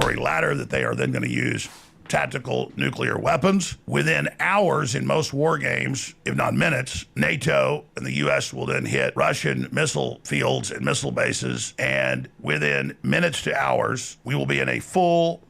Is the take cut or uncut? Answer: cut